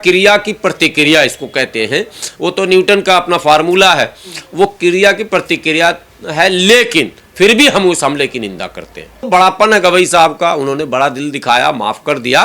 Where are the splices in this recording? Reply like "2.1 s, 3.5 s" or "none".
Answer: 9.2 s